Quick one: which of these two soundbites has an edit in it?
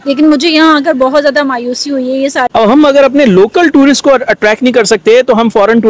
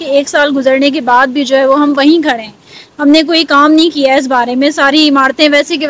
first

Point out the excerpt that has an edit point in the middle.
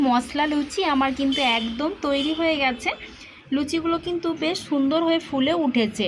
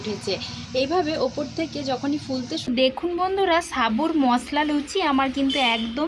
second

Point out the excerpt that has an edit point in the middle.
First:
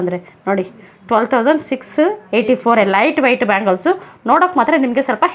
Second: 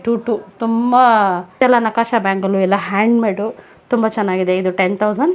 second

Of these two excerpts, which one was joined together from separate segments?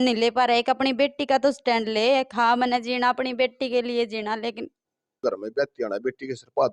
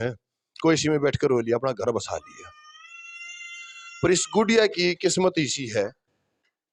first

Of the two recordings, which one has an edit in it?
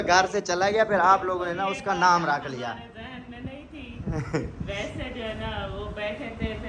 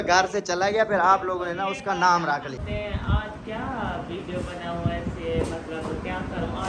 second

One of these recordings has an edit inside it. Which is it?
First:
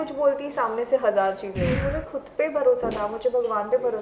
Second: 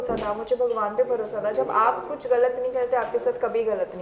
first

